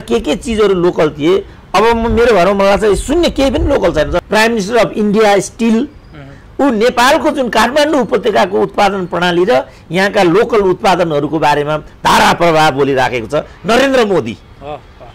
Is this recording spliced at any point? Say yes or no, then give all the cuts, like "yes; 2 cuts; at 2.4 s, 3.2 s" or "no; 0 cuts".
yes; 1 cut; at 4.2 s